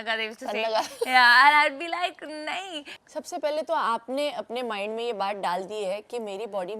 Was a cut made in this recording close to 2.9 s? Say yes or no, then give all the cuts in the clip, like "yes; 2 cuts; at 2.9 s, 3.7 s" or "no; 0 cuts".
yes; 1 cut; at 2.9 s